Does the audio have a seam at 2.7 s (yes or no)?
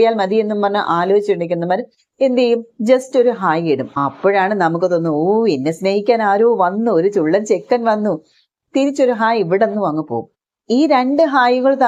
no